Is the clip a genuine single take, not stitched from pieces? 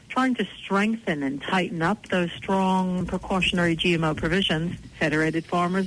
no; 1 cut; at 4.8 s

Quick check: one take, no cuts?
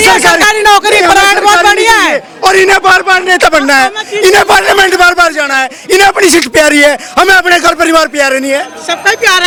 yes; 0 cuts

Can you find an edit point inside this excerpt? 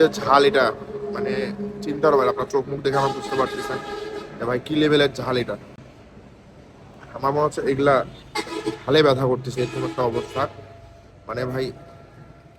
no; 0 cuts

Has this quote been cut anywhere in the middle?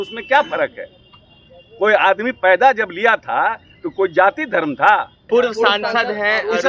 yes; 1 cut; at 5.2 s

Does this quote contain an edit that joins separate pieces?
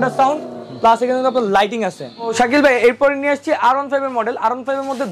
yes; 1 cut; at 2.3 s

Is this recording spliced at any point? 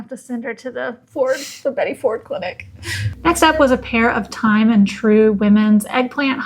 no; 0 cuts

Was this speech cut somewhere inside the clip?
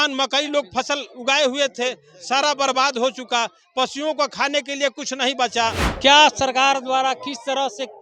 yes; 1 cut; at 5.9 s

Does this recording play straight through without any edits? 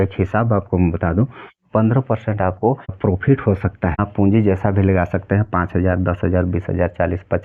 no; 2 cuts; at 3.0 s, 4.1 s

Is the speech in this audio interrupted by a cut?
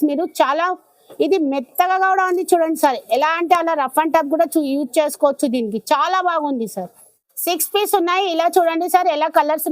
yes; 1 cut; at 7.2 s

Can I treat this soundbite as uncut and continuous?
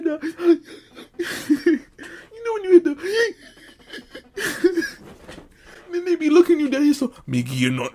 yes; 0 cuts

